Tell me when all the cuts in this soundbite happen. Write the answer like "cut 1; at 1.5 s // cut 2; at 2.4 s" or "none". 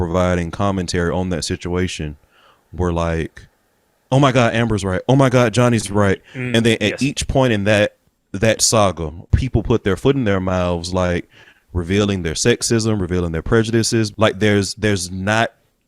cut 1; at 6.3 s // cut 2; at 9.3 s // cut 3; at 14.1 s